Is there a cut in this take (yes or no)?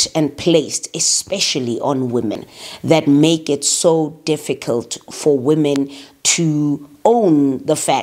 yes